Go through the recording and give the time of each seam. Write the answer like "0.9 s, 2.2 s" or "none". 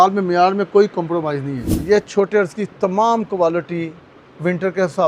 1.8 s